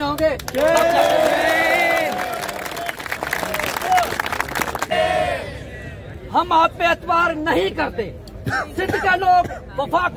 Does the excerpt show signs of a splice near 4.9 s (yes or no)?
yes